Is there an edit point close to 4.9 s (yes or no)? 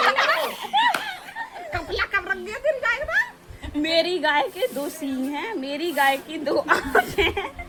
no